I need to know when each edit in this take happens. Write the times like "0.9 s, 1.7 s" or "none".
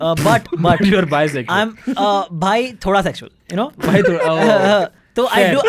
none